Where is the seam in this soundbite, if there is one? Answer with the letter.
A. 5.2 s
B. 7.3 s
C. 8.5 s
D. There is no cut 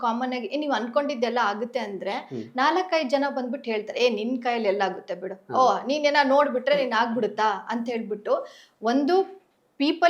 D